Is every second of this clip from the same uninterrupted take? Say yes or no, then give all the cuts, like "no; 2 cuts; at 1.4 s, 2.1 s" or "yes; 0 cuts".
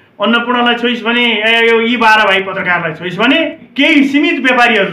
no; 2 cuts; at 2.6 s, 3.7 s